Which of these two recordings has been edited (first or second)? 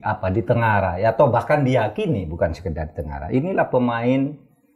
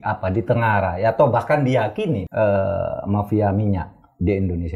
second